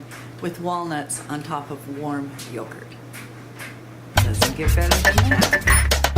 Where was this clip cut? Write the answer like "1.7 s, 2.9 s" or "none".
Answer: 4.0 s